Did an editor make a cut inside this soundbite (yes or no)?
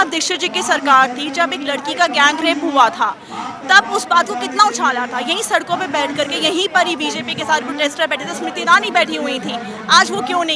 no